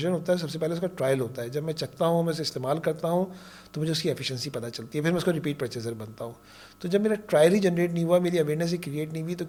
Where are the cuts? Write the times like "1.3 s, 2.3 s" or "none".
none